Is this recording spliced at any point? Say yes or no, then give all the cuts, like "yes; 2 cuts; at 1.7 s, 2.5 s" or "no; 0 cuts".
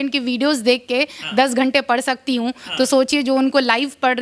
no; 0 cuts